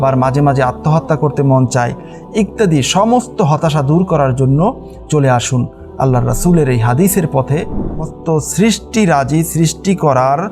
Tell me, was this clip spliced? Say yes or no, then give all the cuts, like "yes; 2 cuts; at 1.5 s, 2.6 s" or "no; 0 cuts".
yes; 1 cut; at 8.0 s